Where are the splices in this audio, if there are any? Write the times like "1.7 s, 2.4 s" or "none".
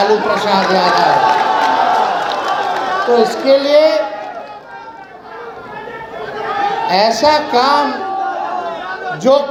none